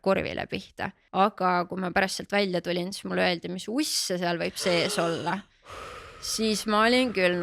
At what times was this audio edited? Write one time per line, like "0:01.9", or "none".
0:01.0